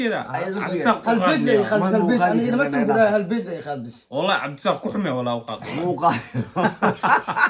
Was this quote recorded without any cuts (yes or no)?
yes